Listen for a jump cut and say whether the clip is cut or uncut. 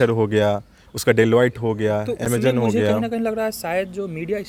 uncut